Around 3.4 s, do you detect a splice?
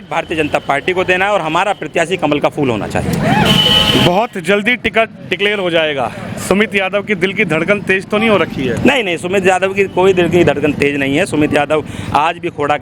no; 0 cuts

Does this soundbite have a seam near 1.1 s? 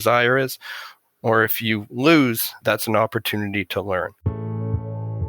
no; 2 cuts; at 2.5 s, 4.2 s

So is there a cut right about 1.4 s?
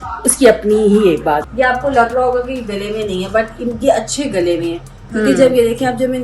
yes; 1 cut; at 1.4 s

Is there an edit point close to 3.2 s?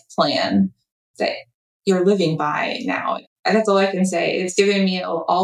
yes; 1 cut; at 3.2 s

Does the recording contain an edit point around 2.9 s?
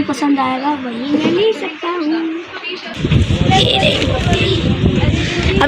yes; 1 cut; at 2.9 s

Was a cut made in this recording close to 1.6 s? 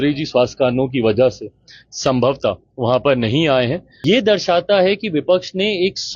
no; 1 cut; at 3.9 s

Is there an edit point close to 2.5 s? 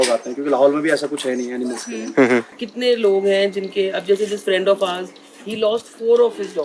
yes; 1 cut; at 2.5 s

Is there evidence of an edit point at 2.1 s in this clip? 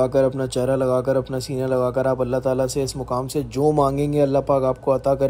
no; 0 cuts

